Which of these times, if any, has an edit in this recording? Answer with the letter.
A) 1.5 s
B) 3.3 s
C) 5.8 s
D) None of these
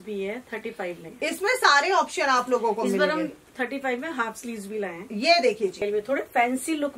C